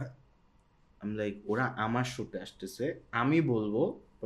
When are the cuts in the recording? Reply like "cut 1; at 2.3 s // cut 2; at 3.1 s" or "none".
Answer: none